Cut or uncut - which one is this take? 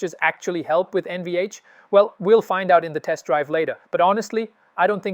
uncut